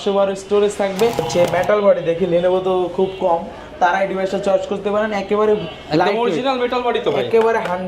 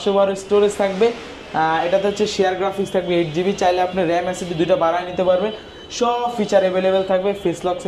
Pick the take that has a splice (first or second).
first